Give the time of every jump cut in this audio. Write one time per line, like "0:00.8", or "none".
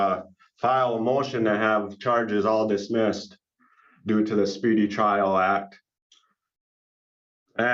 none